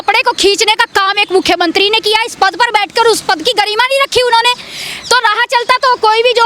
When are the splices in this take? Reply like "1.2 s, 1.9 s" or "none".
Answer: none